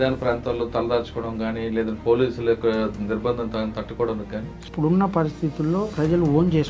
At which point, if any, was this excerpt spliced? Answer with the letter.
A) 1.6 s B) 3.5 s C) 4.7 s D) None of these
C